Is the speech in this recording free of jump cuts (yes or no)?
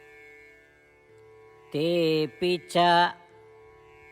no